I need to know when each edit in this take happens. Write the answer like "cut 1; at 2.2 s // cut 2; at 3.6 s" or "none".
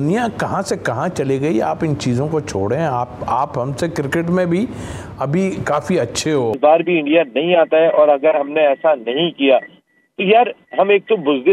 cut 1; at 6.6 s

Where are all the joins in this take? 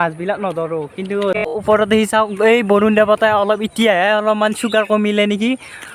cut 1; at 1.5 s

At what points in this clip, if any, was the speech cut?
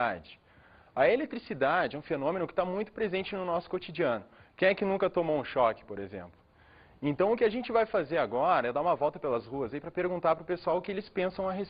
cut 1; at 6.0 s

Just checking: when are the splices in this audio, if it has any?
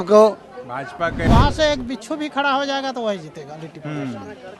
cut 1; at 1.2 s

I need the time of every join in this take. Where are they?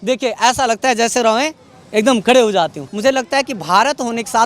cut 1; at 2.9 s

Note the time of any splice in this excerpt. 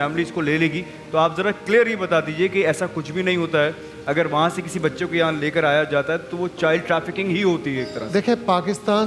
none

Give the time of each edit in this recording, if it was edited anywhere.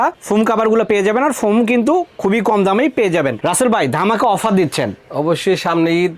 cut 1; at 3.4 s

